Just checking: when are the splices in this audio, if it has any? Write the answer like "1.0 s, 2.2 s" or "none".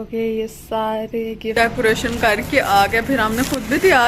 1.5 s